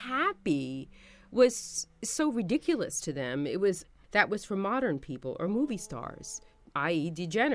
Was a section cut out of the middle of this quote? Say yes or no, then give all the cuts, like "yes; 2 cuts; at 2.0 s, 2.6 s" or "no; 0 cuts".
yes; 1 cut; at 3.9 s